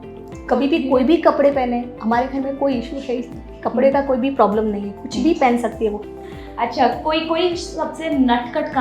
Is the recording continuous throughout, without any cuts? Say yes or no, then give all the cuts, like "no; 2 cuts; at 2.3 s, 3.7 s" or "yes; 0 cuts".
no; 1 cut; at 6.1 s